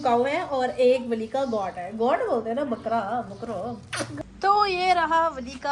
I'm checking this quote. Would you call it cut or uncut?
cut